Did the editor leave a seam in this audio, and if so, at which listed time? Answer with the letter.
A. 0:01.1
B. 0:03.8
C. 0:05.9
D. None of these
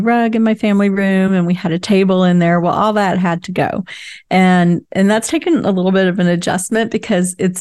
D